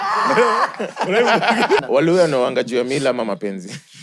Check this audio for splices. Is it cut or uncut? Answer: cut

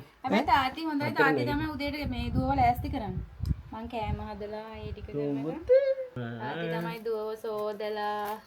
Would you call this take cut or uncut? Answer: cut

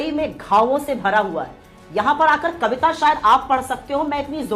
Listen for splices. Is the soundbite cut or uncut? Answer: uncut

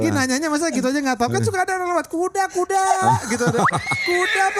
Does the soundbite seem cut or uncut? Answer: uncut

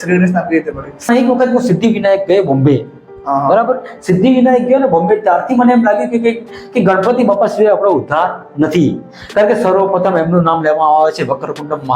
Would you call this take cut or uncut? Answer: cut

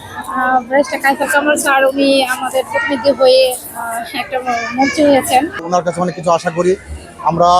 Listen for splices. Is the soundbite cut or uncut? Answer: cut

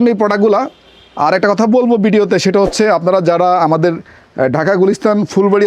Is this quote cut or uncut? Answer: uncut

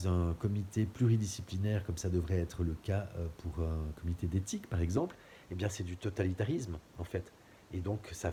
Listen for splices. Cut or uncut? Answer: uncut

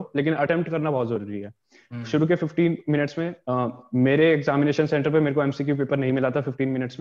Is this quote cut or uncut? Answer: uncut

